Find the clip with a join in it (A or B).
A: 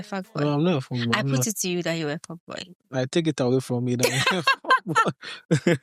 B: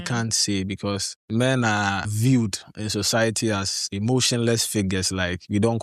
B